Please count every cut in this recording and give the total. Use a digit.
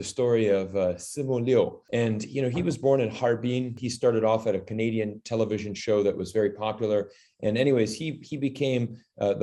1